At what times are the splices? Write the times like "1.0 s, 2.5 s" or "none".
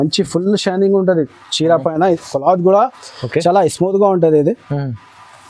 none